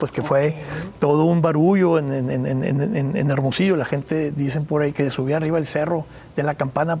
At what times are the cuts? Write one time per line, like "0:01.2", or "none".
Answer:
none